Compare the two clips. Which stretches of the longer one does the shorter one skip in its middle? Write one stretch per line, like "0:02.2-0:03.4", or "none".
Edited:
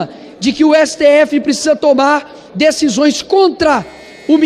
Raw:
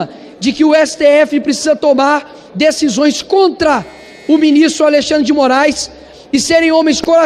none